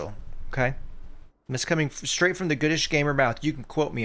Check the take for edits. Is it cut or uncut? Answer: uncut